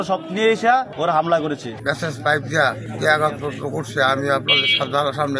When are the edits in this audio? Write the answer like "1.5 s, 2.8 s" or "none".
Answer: 0.9 s, 1.8 s, 2.9 s

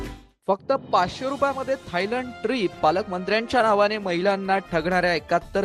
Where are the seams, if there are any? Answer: none

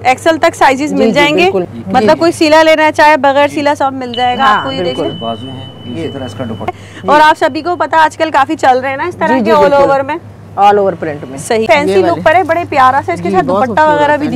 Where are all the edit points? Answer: 1.7 s, 6.7 s, 11.6 s

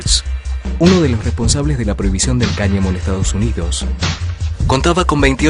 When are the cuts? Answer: 4.2 s

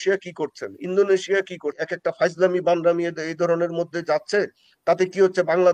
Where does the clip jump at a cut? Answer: 1.8 s

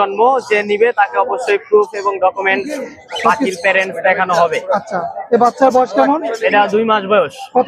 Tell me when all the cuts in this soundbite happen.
none

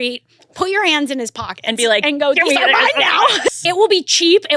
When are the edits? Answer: 3.5 s

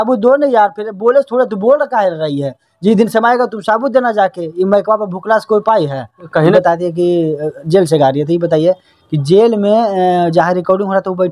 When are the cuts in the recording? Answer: 6.5 s

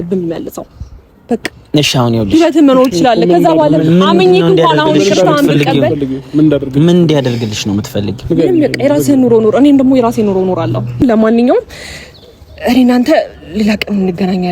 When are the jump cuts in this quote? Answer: 11.0 s

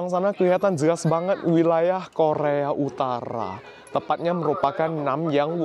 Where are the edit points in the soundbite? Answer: none

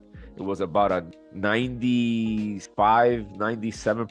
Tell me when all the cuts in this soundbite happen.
1.1 s, 2.6 s

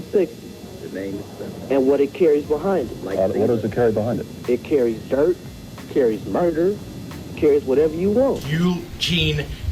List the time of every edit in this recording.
8.4 s

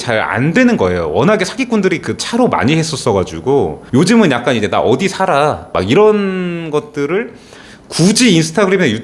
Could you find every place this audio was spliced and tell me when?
5.7 s

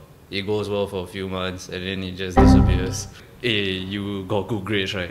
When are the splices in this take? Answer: 3.2 s

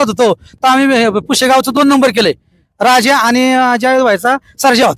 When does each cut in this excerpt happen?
none

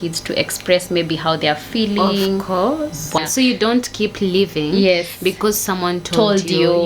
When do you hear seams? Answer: 3.2 s

